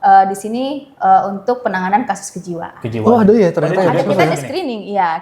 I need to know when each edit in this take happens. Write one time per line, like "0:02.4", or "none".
none